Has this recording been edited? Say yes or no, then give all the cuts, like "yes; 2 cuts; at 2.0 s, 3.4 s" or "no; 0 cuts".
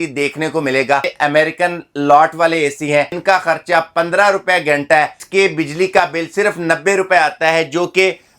yes; 3 cuts; at 1.1 s, 3.1 s, 5.2 s